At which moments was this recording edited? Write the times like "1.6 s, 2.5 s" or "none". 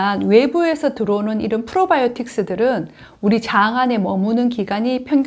none